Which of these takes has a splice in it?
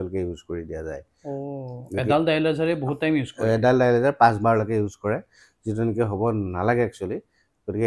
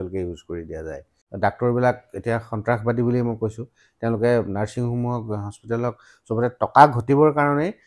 second; 1 cut; at 1.1 s

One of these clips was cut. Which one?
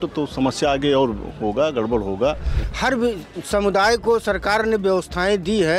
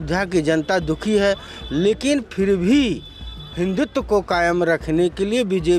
first; 1 cut; at 2.6 s

